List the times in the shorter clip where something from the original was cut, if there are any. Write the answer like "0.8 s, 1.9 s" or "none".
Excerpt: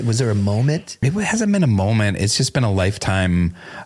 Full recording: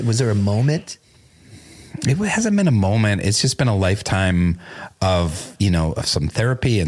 0.9 s